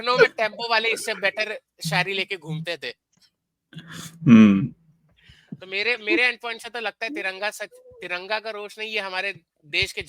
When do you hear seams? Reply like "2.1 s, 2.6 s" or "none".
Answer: none